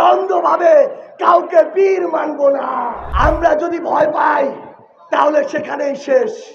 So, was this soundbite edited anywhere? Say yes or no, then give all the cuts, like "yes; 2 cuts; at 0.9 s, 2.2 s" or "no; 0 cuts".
yes; 1 cut; at 3.0 s